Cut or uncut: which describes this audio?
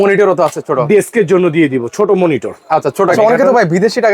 cut